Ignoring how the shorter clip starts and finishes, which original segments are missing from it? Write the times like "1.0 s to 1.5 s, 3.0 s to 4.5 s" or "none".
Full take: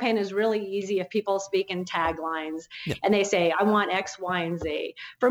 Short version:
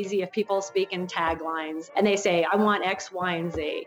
2.6 s to 2.9 s